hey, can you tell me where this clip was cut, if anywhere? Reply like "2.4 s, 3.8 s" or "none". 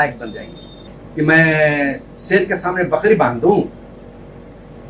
0.9 s